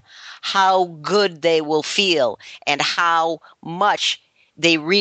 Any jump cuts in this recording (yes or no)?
no